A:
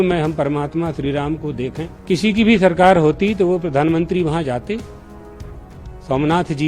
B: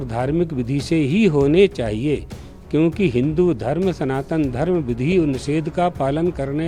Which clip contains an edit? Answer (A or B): A